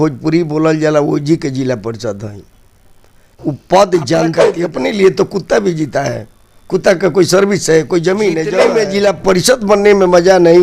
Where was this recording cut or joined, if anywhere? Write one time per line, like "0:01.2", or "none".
0:03.3
0:04.4
0:08.6